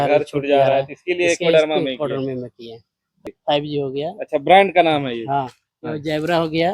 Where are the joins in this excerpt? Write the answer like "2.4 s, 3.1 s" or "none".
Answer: 3.3 s